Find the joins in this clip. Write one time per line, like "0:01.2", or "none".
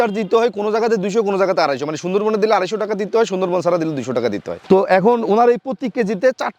0:04.5